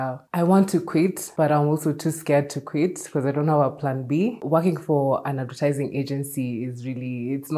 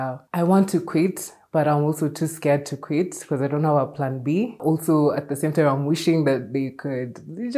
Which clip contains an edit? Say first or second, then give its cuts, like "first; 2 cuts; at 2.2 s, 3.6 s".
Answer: first; 2 cuts; at 1.2 s, 4.4 s